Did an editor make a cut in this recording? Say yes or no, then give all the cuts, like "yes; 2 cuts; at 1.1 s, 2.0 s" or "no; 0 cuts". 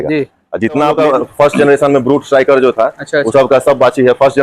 yes; 1 cut; at 0.9 s